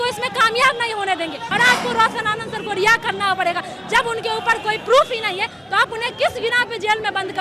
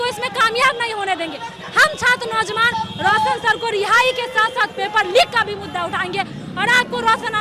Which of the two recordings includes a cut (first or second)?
first